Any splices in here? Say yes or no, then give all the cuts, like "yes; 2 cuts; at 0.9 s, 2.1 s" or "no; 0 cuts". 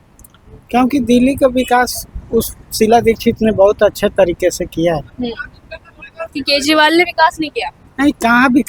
no; 0 cuts